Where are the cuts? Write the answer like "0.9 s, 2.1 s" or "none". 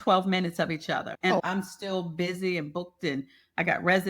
1.1 s